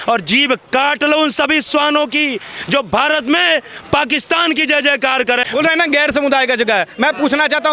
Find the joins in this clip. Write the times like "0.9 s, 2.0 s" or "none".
5.5 s